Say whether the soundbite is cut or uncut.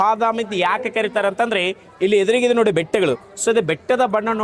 uncut